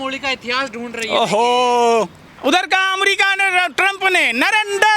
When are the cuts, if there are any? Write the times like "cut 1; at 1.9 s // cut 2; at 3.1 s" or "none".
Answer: cut 1; at 2.2 s